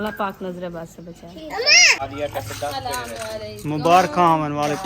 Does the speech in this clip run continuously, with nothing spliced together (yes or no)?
no